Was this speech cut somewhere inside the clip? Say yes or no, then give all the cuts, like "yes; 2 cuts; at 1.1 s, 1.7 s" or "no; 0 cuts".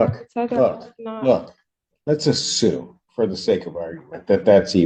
no; 0 cuts